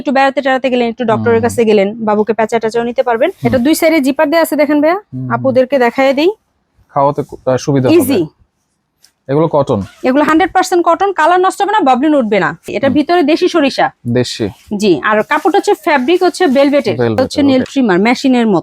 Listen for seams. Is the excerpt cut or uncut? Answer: cut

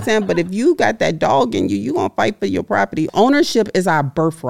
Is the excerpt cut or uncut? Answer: cut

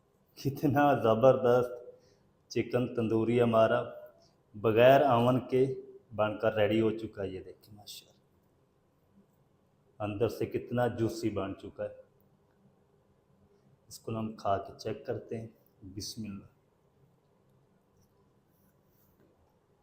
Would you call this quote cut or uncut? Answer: uncut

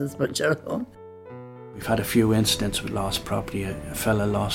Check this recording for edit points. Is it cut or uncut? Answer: cut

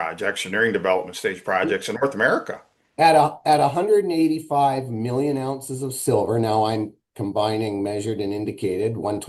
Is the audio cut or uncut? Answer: uncut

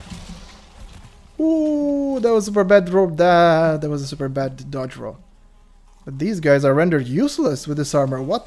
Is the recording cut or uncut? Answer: uncut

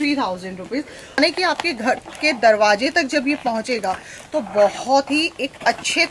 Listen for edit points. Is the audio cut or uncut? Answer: cut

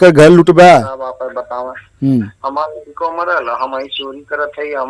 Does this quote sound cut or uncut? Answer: cut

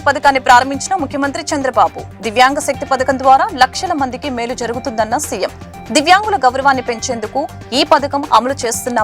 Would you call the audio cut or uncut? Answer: uncut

